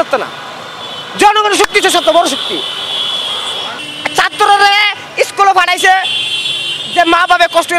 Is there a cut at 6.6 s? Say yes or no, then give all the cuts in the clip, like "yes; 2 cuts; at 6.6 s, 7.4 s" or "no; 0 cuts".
no; 1 cut; at 3.5 s